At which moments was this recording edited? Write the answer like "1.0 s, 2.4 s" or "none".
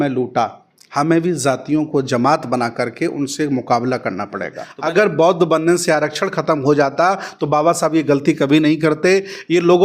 4.7 s